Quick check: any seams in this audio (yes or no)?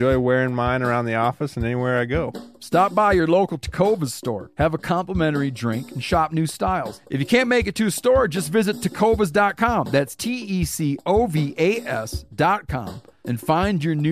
yes